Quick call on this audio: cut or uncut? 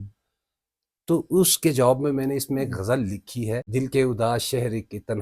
cut